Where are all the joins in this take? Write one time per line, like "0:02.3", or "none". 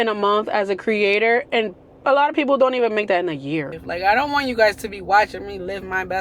0:03.7